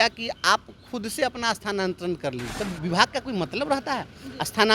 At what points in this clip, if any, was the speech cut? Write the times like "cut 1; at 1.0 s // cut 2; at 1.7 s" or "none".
cut 1; at 2.5 s